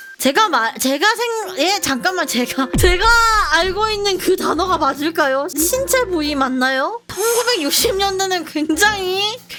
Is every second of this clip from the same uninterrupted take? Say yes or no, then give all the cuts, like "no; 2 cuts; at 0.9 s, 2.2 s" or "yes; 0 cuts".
yes; 0 cuts